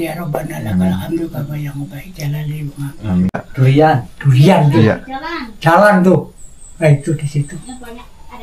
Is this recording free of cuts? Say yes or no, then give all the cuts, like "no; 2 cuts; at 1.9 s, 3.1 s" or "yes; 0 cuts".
no; 1 cut; at 3.4 s